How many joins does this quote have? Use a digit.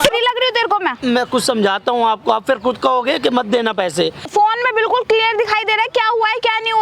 1